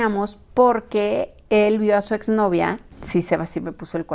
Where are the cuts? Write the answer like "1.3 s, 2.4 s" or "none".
none